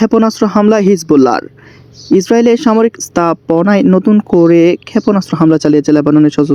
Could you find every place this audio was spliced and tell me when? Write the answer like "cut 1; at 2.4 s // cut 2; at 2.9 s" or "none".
none